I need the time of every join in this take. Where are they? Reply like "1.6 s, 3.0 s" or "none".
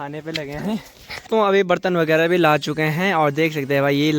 1.3 s